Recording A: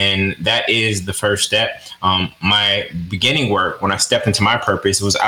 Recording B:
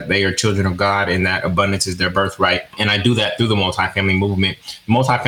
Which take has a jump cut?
B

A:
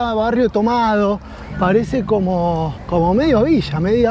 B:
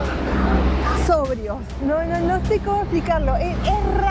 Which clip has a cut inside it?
A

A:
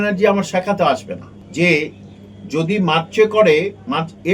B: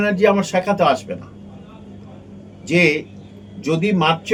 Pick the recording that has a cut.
A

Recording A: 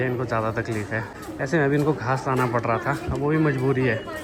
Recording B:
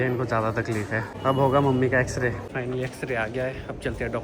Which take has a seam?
B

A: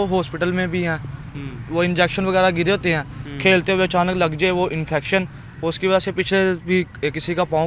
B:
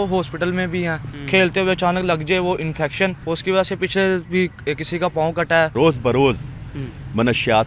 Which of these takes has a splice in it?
B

